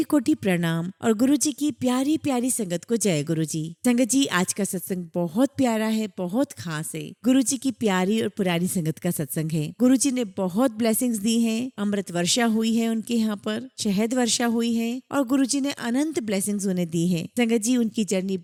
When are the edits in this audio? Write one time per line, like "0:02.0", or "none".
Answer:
none